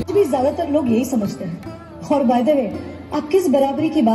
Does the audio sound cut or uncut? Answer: uncut